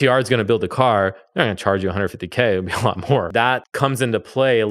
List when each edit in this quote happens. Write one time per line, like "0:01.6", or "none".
0:03.3